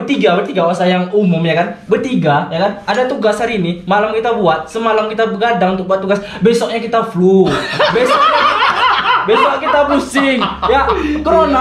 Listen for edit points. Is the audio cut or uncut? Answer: uncut